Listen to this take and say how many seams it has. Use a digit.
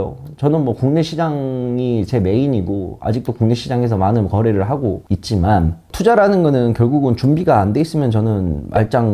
0